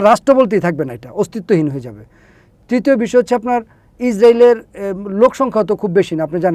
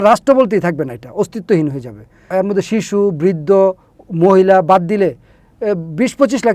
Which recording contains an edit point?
second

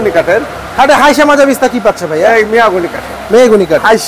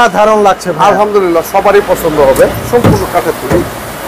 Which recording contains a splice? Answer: second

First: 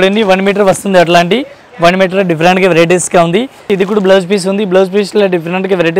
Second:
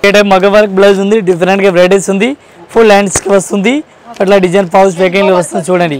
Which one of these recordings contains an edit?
first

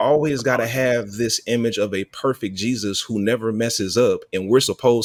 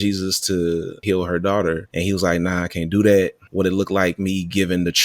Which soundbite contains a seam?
second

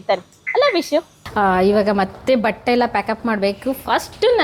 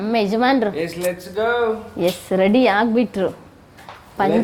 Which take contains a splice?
first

